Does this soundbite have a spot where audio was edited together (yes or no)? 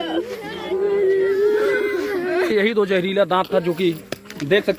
yes